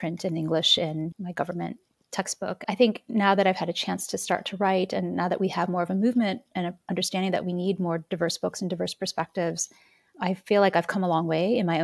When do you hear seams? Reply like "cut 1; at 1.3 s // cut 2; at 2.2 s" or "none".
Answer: cut 1; at 1.1 s